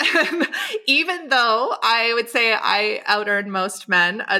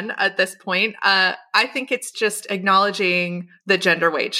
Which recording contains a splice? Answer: second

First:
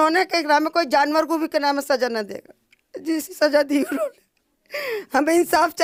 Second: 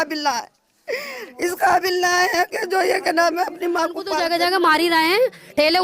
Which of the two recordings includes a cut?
second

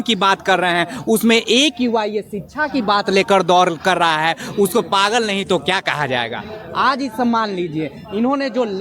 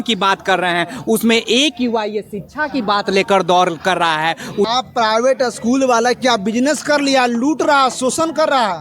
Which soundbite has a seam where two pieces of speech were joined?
second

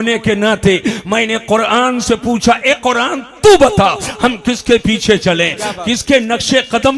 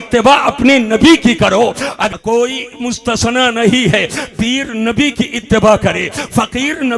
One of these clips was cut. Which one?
second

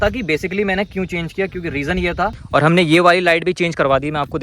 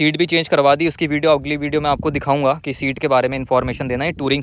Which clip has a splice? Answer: first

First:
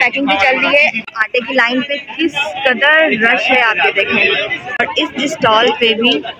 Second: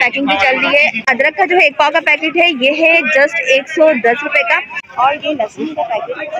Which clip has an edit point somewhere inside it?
first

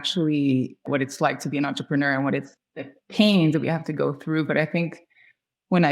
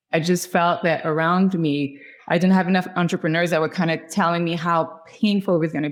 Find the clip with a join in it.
first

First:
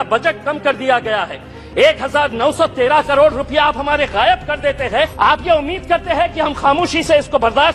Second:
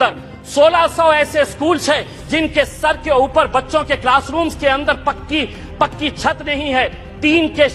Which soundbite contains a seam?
first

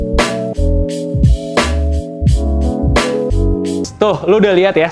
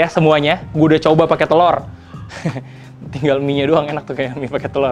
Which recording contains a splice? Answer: first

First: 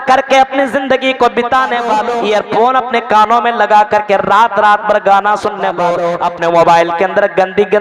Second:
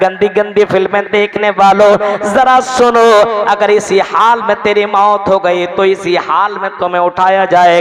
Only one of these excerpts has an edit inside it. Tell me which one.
first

